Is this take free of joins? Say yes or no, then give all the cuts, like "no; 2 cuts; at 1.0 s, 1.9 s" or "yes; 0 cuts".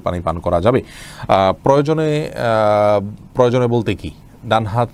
yes; 0 cuts